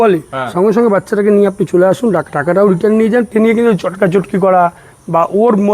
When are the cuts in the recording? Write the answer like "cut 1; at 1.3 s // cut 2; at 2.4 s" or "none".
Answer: cut 1; at 3.3 s